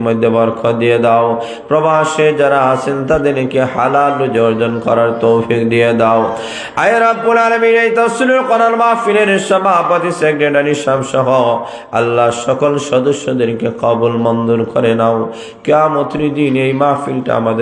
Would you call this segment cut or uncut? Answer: uncut